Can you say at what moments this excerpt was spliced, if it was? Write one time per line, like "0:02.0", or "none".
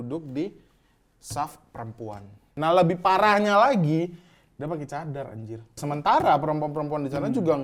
0:02.5
0:05.8